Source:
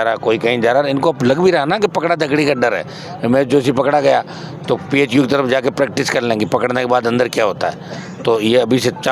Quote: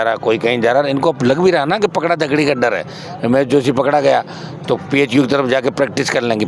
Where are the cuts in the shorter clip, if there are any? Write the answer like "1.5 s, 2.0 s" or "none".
none